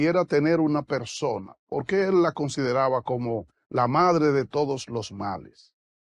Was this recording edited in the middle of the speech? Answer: no; 0 cuts

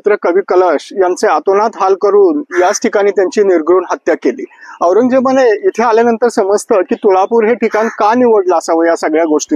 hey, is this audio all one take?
yes; 0 cuts

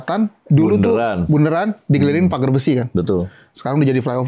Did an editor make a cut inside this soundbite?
no; 0 cuts

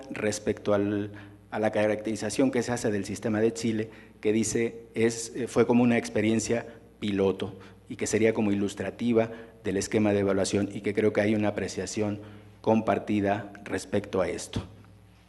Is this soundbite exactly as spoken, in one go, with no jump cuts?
no; 1 cut; at 13.5 s

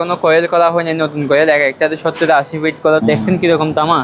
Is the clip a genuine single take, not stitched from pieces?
no; 1 cut; at 3.0 s

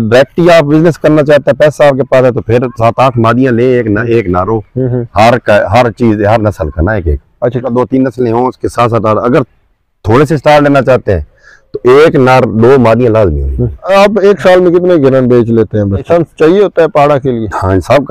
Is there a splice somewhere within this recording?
yes; 2 cuts; at 13.8 s, 16.0 s

